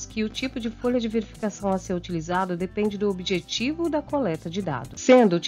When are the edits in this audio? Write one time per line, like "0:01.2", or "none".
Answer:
none